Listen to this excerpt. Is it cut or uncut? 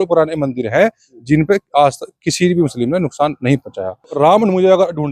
cut